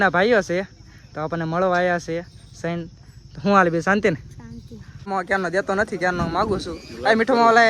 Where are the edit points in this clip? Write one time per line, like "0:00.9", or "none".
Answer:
0:05.1